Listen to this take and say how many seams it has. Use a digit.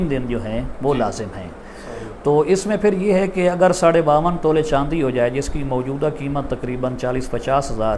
0